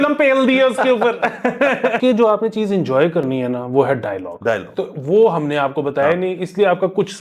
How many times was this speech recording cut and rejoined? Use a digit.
1